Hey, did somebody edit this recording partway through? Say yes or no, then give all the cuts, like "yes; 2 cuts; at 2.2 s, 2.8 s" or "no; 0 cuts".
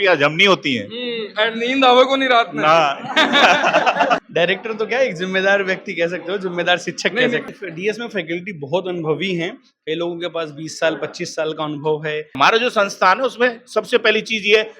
yes; 3 cuts; at 4.3 s, 7.4 s, 12.4 s